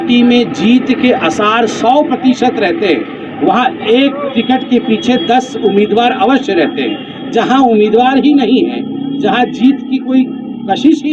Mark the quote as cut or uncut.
uncut